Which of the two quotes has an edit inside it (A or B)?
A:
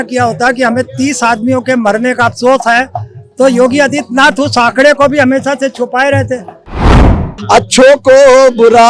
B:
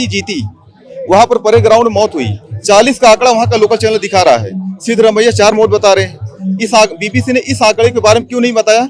A